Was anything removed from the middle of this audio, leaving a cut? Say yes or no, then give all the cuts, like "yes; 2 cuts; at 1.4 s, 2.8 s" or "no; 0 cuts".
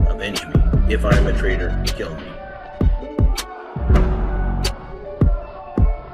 yes; 1 cut; at 2.4 s